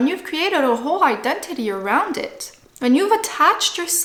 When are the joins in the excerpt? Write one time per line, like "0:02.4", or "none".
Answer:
none

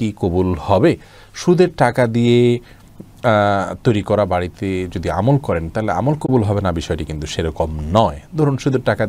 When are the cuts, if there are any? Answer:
none

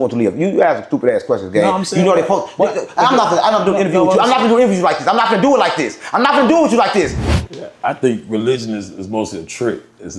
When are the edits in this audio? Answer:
0:07.4

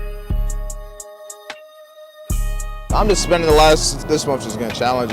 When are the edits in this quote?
0:02.8
0:03.9

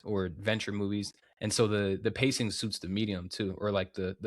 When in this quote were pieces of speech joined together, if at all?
0:01.2

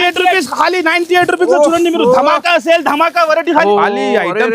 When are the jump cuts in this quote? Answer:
0:03.6

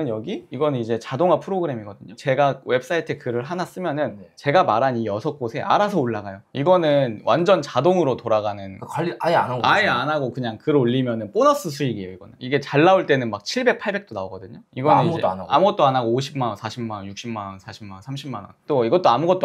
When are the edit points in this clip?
0:06.4
0:18.5

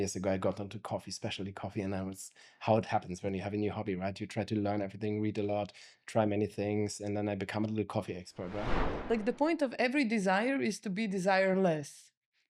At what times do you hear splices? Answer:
0:08.9

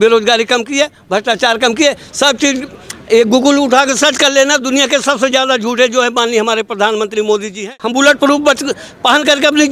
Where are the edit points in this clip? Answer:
0:07.6

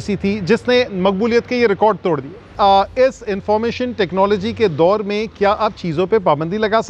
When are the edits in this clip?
0:02.4

